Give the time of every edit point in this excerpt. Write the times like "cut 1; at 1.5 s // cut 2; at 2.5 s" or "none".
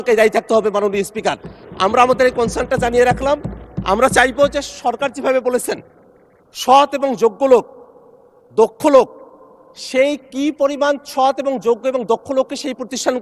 none